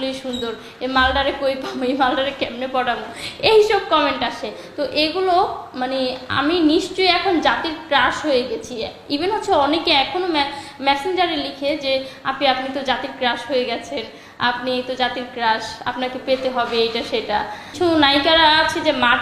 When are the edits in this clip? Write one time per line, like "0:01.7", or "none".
none